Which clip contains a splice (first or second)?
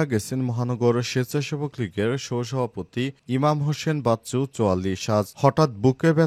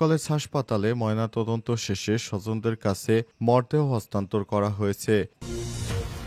second